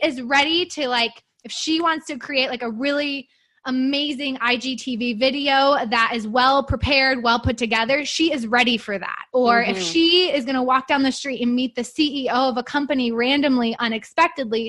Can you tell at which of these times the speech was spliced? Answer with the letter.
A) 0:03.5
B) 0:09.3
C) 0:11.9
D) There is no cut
D